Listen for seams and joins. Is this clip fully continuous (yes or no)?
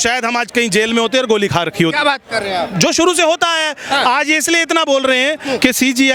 yes